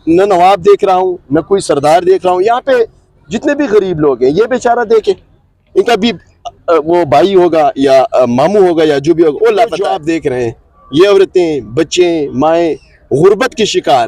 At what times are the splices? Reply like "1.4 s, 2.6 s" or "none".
9.9 s